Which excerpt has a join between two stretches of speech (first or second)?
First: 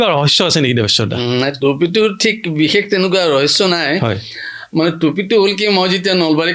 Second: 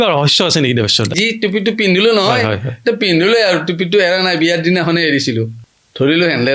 second